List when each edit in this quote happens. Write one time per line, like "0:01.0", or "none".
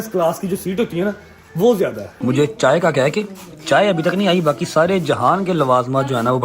0:02.1